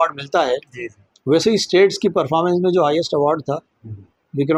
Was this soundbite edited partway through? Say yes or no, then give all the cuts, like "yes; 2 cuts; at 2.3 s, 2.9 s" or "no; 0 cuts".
no; 0 cuts